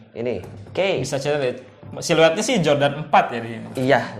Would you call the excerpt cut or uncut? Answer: uncut